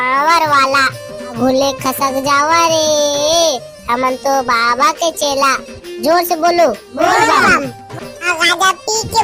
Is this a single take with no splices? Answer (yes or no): no